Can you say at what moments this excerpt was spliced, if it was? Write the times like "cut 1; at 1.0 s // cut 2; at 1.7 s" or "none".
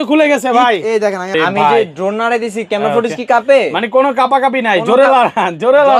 cut 1; at 1.7 s

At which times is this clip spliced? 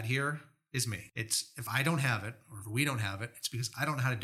cut 1; at 1.1 s

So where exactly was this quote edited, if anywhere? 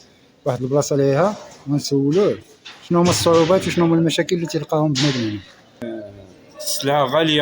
cut 1; at 5.8 s

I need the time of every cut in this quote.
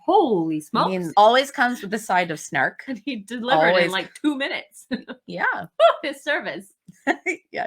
cut 1; at 1.1 s

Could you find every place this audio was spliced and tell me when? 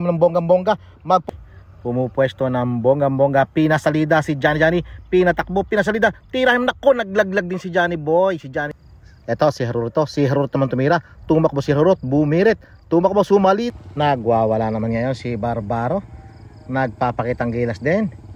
cut 1; at 1.2 s // cut 2; at 8.8 s // cut 3; at 13.7 s

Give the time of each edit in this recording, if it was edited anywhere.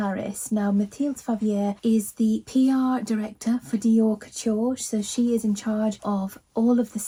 none

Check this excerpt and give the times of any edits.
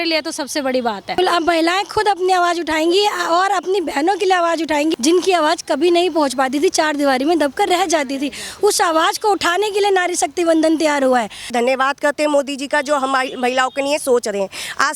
cut 1; at 1.2 s // cut 2; at 4.9 s // cut 3; at 11.5 s

